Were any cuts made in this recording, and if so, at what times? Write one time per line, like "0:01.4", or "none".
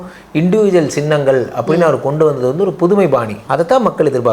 0:03.4